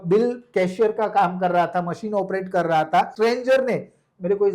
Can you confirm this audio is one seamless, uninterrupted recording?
no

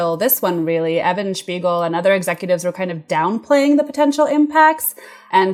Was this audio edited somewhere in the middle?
no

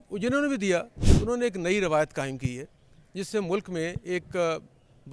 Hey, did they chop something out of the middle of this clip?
yes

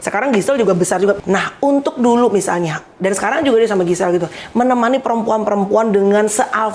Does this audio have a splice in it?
yes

